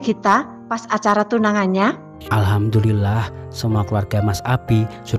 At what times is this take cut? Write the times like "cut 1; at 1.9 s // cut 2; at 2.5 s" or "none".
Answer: cut 1; at 2.1 s